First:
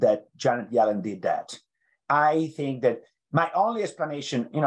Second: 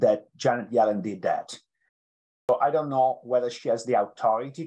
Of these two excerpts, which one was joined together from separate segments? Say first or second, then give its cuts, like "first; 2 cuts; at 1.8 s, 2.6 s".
second; 1 cut; at 2.1 s